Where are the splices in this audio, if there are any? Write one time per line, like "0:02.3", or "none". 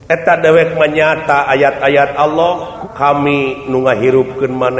0:02.7